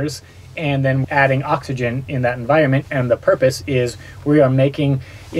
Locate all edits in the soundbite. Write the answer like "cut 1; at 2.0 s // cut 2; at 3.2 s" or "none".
cut 1; at 1.0 s